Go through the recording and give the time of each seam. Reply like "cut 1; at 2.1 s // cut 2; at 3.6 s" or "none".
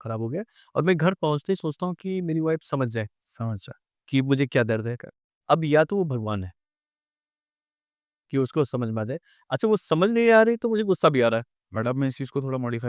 cut 1; at 11.6 s